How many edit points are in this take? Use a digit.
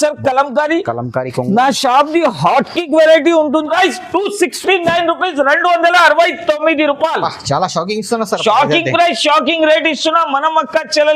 1